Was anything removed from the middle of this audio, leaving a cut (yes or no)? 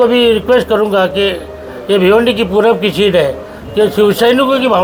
no